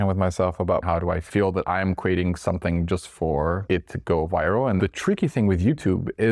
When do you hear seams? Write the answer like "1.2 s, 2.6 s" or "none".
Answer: 1.0 s, 3.6 s, 4.8 s